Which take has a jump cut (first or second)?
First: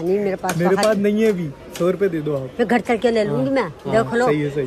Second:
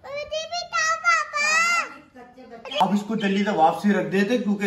second